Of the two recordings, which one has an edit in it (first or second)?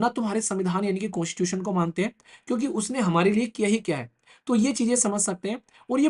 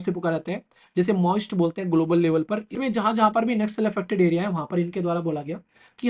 second